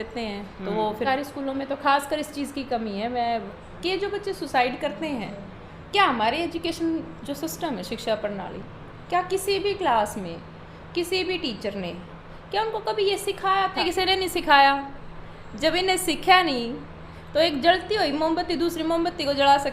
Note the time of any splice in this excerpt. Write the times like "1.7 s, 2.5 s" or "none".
1.1 s, 3.5 s, 13.8 s